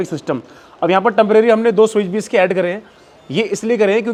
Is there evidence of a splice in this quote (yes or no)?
no